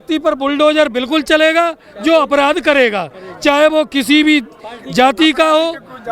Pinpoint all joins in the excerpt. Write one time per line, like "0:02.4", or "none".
none